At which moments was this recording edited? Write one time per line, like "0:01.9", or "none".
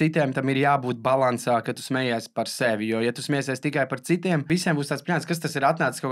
0:04.4